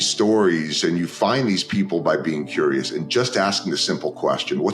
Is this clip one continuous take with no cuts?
yes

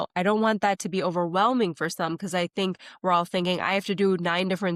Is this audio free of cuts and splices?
yes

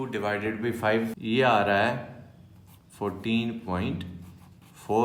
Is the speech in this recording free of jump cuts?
yes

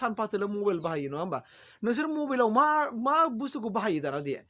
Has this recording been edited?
no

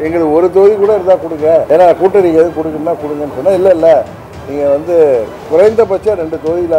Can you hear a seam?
yes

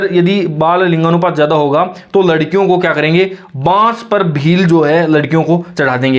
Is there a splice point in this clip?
no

